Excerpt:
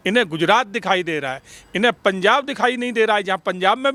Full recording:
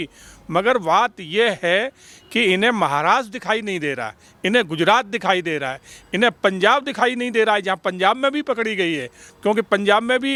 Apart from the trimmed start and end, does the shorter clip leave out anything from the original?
no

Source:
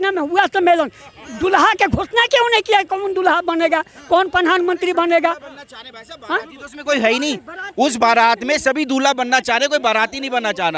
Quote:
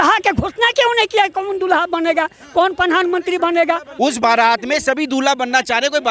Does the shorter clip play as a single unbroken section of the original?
no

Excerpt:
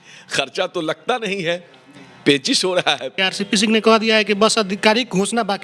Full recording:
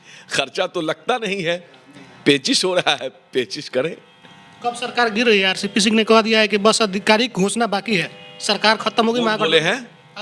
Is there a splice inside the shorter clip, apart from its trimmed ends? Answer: yes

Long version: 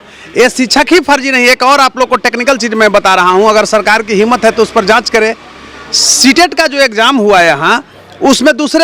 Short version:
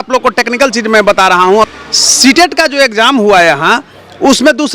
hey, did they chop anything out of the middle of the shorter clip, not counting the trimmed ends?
yes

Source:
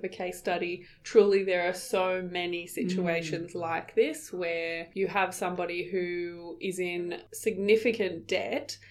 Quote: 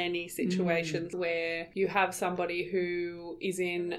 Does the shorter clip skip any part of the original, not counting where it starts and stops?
yes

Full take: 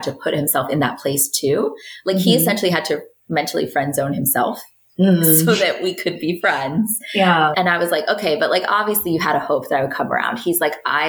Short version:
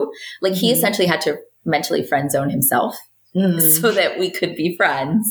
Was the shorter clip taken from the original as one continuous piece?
yes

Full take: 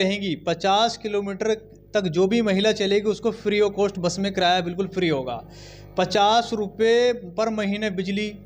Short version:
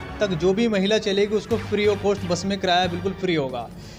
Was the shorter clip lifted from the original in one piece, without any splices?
yes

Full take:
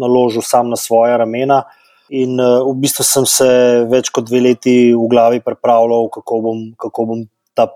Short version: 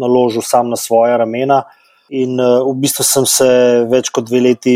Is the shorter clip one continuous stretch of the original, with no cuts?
yes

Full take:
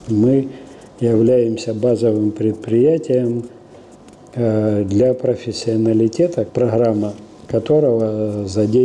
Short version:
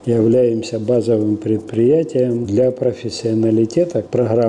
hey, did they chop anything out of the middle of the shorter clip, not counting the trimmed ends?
yes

